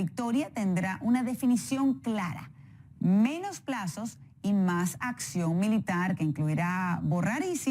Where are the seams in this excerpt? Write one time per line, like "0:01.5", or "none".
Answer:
0:03.6